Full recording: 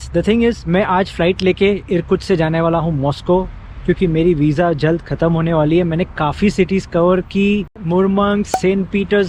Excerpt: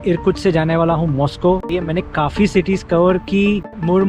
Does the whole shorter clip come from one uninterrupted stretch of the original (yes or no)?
no